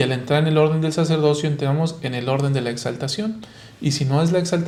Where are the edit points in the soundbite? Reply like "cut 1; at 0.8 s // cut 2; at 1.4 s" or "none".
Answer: none